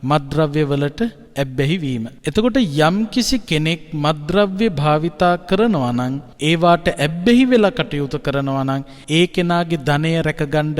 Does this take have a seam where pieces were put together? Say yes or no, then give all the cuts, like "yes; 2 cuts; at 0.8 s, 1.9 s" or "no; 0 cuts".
yes; 3 cuts; at 1.7 s, 6.2 s, 8.9 s